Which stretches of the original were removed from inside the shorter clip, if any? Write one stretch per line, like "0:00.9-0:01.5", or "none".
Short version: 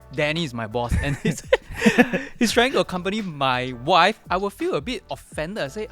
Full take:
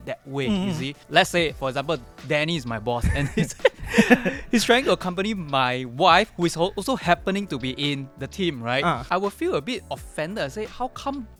0:06.3-0:09.0